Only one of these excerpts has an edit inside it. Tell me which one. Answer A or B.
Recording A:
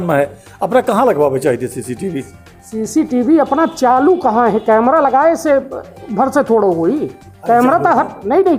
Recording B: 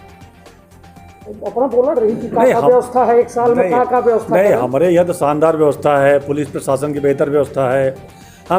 B